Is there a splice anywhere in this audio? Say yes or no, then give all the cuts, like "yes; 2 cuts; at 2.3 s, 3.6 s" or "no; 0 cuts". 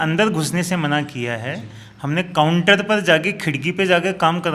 no; 0 cuts